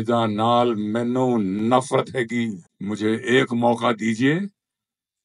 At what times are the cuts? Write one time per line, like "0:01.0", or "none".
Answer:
0:02.7